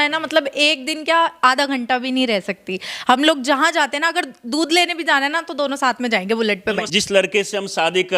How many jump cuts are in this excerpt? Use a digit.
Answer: 1